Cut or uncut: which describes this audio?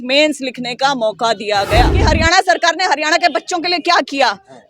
cut